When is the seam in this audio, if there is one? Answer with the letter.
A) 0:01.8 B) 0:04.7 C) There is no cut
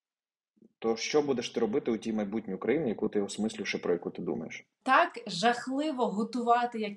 B